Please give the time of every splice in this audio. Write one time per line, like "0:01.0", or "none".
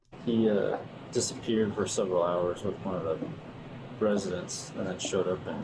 0:01.0